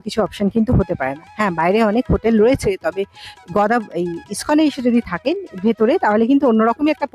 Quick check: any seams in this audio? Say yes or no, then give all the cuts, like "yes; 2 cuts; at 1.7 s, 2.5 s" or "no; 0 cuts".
no; 0 cuts